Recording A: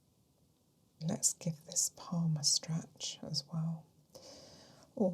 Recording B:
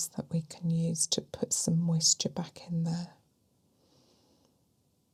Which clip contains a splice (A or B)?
A